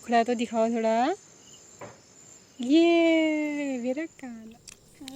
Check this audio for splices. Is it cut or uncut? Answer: cut